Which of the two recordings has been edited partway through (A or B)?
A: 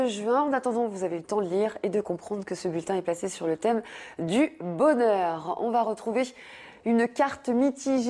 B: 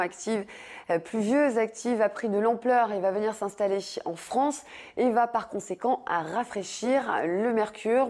B